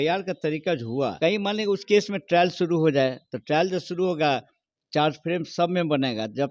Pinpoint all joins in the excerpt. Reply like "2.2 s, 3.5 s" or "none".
1.1 s